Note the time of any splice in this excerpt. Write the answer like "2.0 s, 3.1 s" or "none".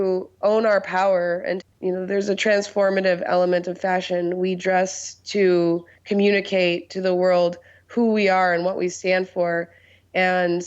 1.7 s